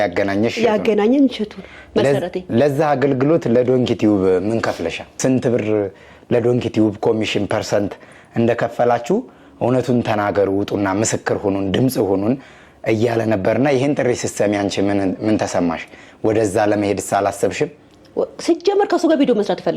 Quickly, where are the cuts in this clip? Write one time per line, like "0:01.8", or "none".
0:05.2